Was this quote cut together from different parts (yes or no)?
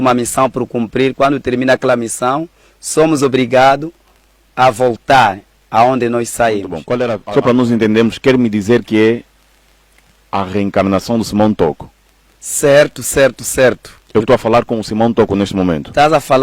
yes